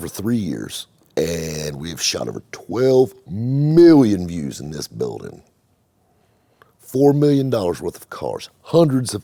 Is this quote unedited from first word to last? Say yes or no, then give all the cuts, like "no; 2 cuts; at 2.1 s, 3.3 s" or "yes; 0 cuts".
yes; 0 cuts